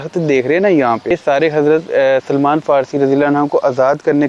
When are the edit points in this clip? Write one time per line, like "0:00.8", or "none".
0:01.1